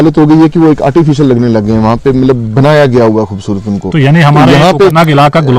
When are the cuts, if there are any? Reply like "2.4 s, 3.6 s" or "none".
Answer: none